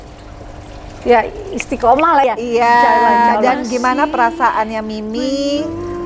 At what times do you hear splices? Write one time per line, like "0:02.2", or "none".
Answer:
0:02.2